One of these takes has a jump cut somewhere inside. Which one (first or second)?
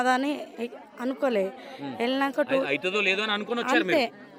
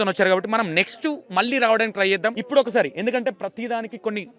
second